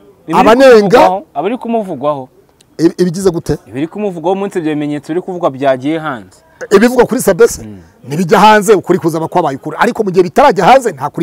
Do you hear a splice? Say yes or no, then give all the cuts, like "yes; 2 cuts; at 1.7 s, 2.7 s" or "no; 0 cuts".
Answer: no; 0 cuts